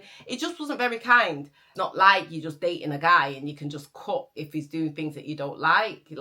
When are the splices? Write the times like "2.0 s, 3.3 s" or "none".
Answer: 1.6 s